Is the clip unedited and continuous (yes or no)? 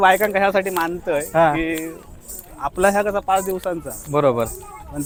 yes